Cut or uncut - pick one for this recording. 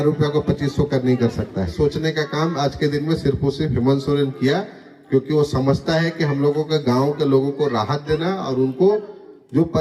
cut